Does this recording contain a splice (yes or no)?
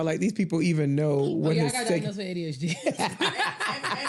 no